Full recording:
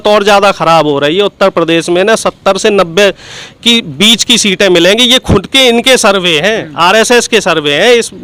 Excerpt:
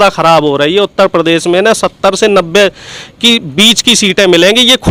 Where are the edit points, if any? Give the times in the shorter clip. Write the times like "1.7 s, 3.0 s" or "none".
none